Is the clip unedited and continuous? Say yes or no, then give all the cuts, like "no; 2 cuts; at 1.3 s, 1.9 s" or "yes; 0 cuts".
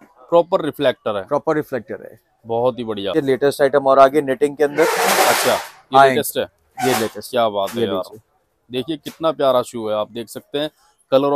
no; 1 cut; at 3.1 s